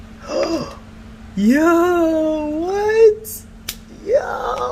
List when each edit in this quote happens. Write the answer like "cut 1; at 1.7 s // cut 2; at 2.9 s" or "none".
none